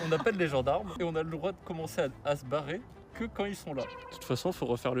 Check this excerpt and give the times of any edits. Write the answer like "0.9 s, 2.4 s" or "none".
0.9 s, 4.0 s